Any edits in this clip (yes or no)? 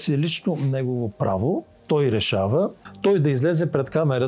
yes